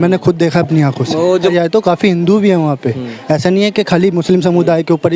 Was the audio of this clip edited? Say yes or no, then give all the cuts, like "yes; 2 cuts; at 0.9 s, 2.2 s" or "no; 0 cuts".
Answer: yes; 1 cut; at 1.5 s